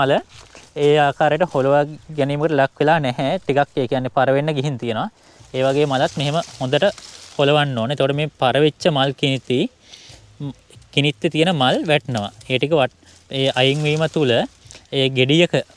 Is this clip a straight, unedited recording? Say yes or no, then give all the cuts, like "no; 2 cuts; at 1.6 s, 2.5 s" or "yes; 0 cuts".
yes; 0 cuts